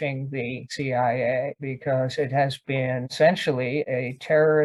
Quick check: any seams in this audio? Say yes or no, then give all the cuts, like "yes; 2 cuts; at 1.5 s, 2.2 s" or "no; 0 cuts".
no; 0 cuts